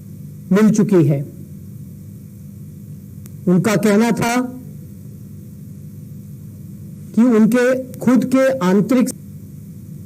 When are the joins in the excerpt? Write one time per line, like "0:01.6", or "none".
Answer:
0:09.1